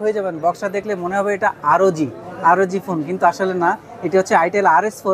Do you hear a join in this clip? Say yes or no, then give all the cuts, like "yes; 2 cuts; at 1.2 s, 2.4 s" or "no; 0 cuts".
no; 0 cuts